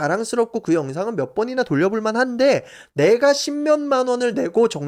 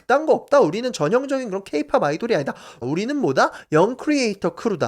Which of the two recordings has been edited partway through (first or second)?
second